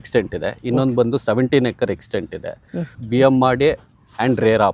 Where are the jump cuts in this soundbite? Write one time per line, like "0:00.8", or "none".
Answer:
none